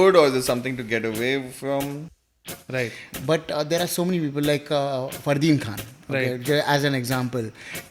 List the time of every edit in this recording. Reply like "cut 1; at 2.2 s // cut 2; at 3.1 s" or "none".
cut 1; at 2.3 s